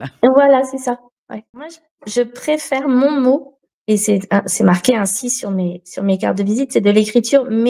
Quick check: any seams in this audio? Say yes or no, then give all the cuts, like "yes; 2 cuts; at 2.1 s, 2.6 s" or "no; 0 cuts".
yes; 1 cut; at 1.9 s